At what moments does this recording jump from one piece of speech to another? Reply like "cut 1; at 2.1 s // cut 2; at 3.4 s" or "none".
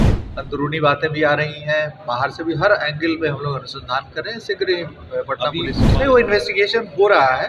cut 1; at 5.8 s